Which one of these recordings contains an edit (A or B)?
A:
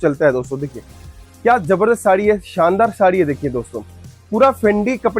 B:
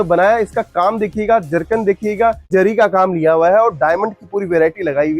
B